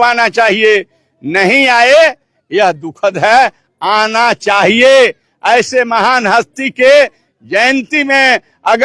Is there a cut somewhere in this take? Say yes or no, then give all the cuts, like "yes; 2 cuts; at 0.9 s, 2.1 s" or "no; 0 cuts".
no; 0 cuts